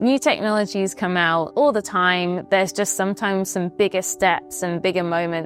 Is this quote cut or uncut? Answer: uncut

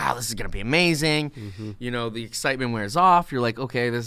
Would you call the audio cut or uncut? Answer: uncut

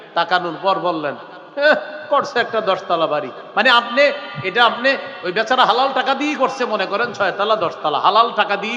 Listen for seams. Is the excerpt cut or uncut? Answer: uncut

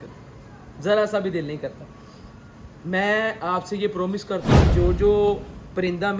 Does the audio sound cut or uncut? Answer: uncut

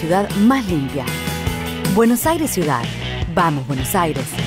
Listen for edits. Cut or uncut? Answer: cut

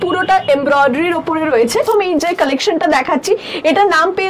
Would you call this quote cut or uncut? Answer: cut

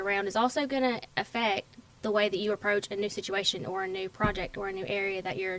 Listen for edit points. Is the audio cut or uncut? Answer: uncut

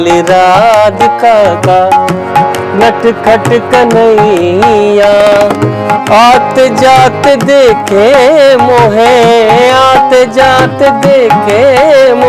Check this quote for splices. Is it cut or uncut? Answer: uncut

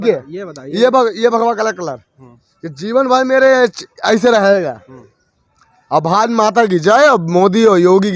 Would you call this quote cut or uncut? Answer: uncut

